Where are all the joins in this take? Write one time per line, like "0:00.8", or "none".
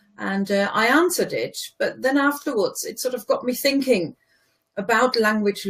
0:04.3